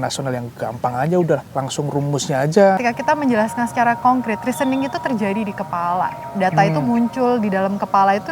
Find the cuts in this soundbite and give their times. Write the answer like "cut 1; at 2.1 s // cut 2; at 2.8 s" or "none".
cut 1; at 1.5 s // cut 2; at 2.8 s